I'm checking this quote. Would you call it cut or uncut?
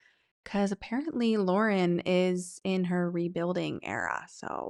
uncut